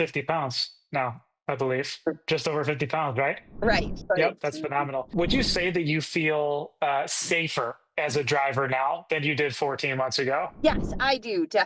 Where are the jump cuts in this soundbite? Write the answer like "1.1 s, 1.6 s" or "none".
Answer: 5.1 s, 10.5 s